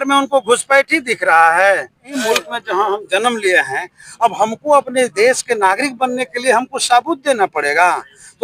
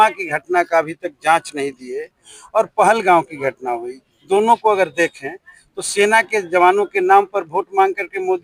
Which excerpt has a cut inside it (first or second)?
first